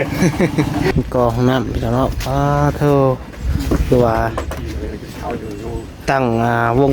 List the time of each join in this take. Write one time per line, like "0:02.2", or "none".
0:00.9